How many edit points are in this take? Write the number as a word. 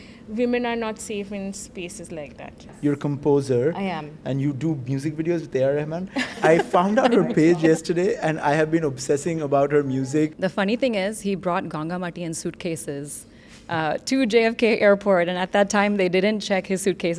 three